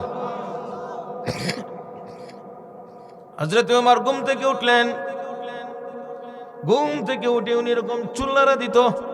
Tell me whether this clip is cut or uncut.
uncut